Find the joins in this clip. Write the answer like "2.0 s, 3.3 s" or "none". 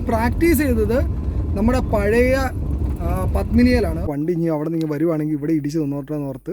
4.1 s